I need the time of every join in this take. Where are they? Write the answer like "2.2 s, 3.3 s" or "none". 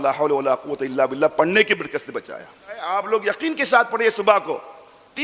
2.8 s